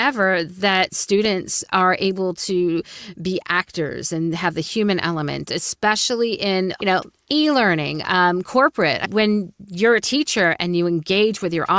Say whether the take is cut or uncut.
cut